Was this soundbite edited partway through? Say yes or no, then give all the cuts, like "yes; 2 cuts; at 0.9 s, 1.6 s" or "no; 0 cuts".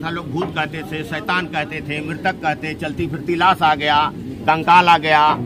no; 0 cuts